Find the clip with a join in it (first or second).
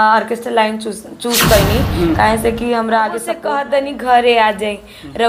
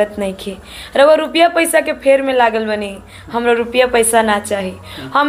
first